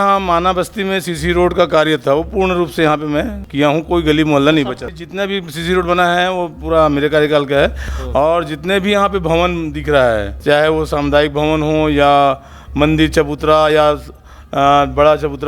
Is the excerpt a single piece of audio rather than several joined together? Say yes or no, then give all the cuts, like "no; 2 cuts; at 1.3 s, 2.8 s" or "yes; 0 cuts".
no; 4 cuts; at 3.4 s, 4.9 s, 7.9 s, 10.3 s